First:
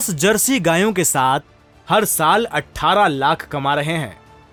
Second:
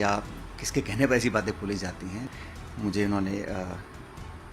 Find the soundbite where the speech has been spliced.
second; 1 cut; at 2.2 s

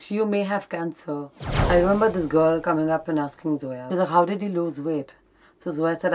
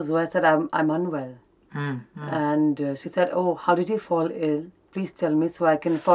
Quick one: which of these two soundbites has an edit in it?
first; 2 cuts; at 1.5 s, 3.8 s

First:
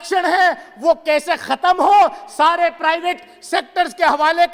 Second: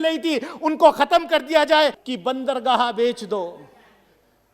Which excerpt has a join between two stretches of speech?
second; 1 cut; at 2.0 s

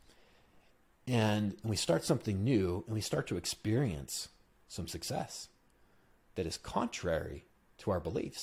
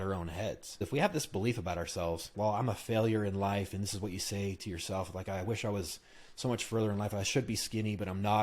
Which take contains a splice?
second; 2 cuts; at 0.8 s, 2.3 s

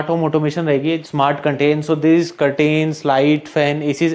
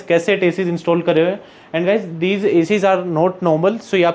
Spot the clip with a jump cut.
first; 1 cut; at 1.0 s

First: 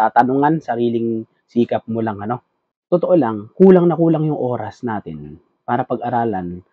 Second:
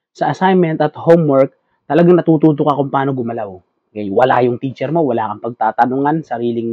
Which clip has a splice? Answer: first; 1 cut; at 2.7 s

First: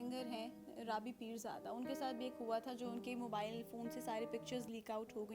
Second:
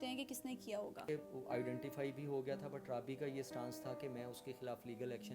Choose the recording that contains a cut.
second; 1 cut; at 1.0 s

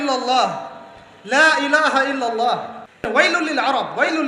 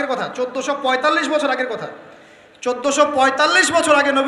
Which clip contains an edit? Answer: first; 1 cut; at 3.1 s

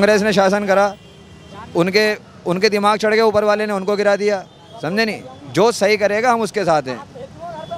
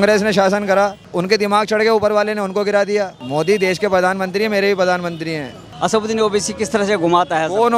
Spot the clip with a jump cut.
second; 3 cuts; at 1.0 s, 3.2 s, 5.7 s

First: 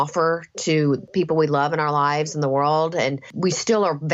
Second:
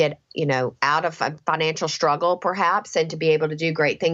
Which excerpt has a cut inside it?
first; 2 cuts; at 1.1 s, 3.3 s

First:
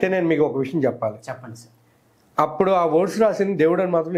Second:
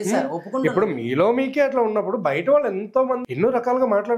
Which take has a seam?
second; 1 cut; at 3.2 s

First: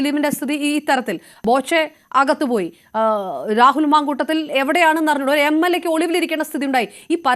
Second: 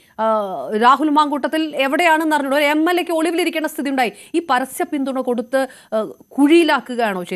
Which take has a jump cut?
first; 1 cut; at 1.3 s

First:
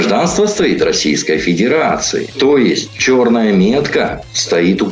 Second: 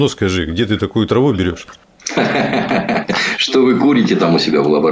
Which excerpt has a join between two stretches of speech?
first; 1 cut; at 2.7 s

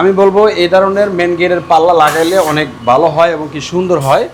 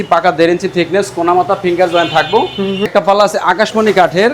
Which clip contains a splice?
second; 1 cut; at 2.9 s

